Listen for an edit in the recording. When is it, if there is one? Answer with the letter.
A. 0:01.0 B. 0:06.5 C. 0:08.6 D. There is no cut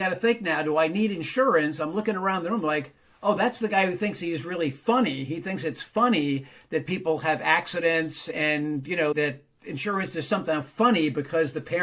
C